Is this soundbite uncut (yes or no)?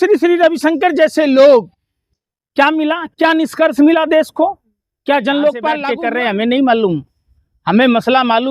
no